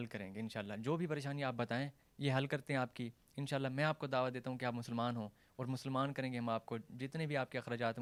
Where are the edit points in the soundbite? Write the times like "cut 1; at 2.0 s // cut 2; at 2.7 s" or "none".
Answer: none